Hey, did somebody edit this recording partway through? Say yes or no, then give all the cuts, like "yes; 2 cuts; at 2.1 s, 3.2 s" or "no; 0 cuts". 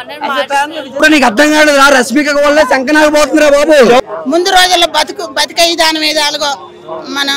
yes; 2 cuts; at 1.0 s, 4.0 s